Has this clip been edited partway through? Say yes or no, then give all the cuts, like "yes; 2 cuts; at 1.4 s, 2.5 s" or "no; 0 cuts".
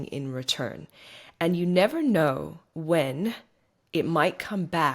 no; 0 cuts